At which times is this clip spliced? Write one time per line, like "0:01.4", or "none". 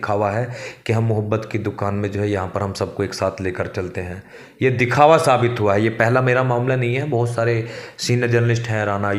none